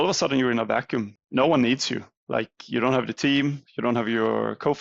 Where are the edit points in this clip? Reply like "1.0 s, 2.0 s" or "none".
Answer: 1.2 s